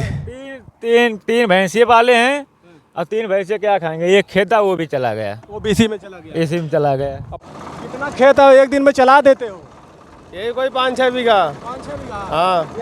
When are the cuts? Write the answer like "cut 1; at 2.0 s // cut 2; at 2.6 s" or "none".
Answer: cut 1; at 7.3 s